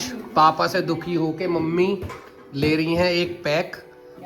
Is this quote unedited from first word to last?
yes; 0 cuts

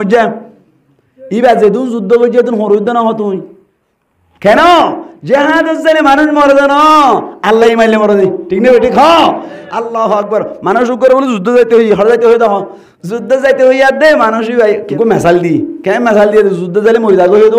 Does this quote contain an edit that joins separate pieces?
yes; 1 cut; at 14.9 s

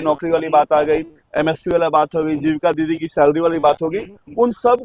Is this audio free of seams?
yes; 0 cuts

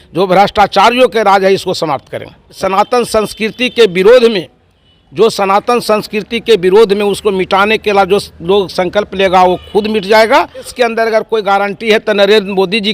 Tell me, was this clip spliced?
yes; 2 cuts; at 2.6 s, 10.7 s

